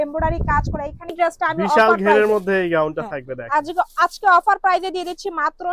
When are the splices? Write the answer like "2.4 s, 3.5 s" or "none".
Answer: 1.1 s